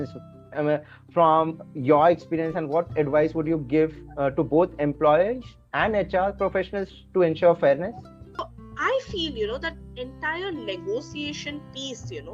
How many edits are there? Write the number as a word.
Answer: one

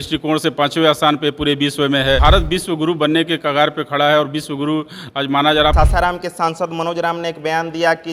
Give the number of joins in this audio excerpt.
two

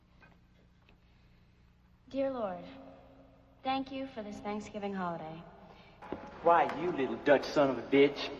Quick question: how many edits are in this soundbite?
one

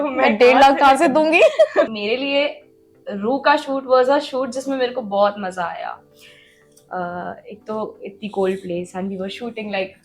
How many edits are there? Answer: one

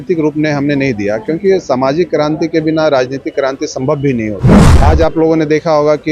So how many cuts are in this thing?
one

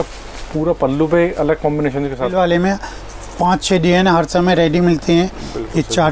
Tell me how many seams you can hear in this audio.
one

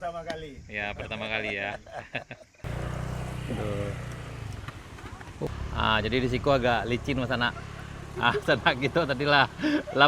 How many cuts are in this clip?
two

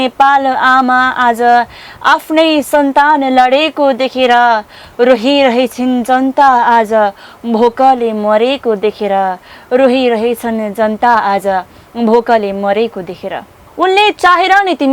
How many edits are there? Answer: one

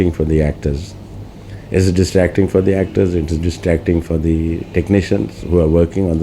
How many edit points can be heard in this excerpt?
zero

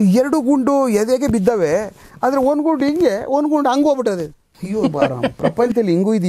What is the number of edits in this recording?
zero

